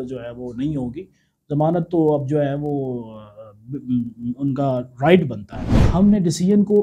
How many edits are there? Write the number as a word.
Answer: one